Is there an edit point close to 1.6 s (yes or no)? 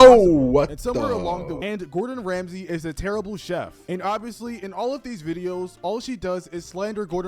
yes